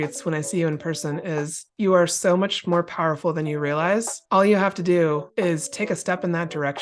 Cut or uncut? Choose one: cut